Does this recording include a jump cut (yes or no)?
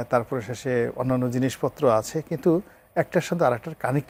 no